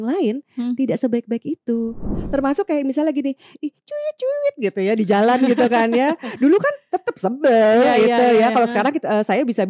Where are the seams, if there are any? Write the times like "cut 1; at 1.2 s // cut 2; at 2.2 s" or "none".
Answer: cut 1; at 2.2 s